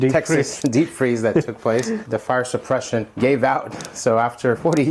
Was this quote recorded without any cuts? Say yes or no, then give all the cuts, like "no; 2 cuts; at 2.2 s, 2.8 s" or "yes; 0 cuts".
yes; 0 cuts